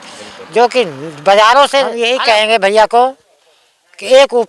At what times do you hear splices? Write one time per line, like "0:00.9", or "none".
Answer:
0:02.0